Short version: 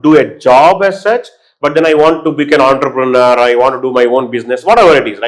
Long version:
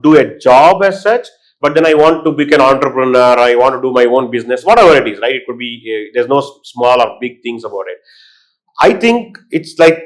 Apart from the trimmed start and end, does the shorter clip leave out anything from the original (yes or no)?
no